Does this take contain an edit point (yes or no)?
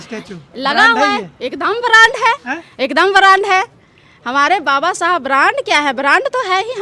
no